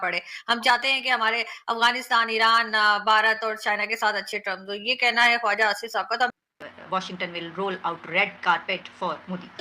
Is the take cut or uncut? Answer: cut